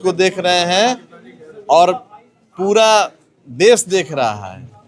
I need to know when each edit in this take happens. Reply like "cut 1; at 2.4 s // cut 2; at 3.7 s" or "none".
none